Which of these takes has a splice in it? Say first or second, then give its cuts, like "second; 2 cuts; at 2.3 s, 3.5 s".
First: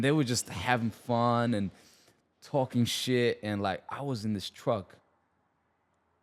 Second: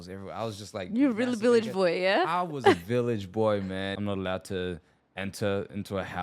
second; 1 cut; at 3.9 s